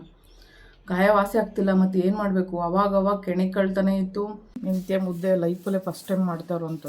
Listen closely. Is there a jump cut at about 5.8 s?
no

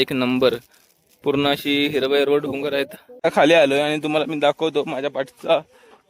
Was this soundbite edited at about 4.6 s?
no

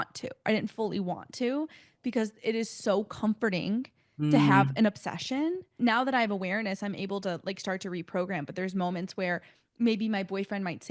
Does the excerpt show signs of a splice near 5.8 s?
yes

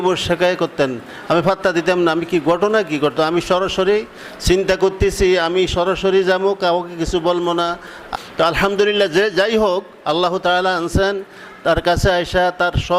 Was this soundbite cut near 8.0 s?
yes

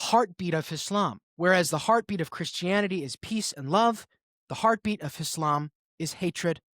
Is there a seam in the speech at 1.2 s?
yes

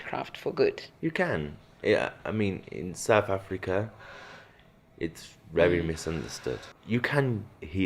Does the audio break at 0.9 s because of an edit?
yes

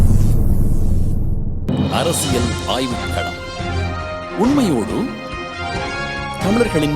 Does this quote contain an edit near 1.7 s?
yes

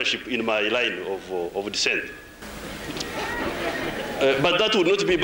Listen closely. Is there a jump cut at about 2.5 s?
yes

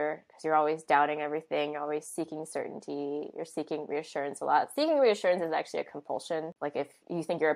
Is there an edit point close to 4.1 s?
no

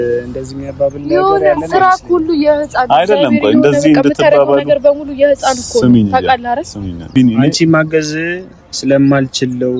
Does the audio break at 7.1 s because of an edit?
yes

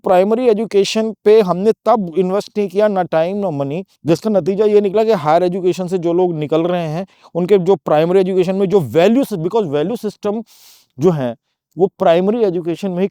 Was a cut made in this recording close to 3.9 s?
yes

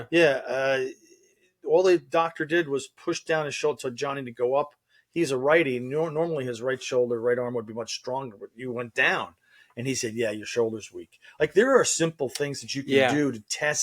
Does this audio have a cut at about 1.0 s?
no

